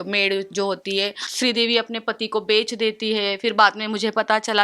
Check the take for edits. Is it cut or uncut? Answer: cut